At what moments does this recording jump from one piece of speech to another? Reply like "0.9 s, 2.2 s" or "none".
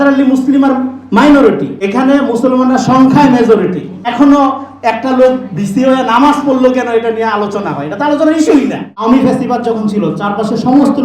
1.7 s, 4.1 s, 8.9 s